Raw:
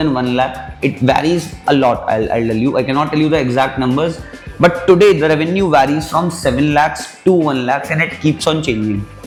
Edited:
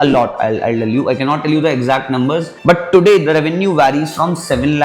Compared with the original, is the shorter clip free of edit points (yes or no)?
no